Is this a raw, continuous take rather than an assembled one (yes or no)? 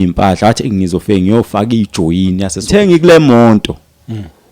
no